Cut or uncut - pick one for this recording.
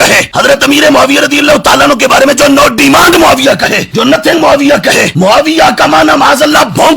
cut